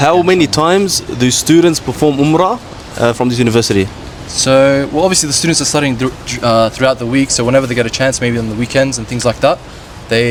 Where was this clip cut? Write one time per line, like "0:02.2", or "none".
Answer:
none